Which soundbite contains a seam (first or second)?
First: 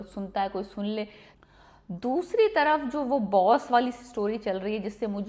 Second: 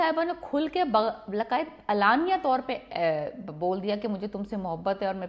first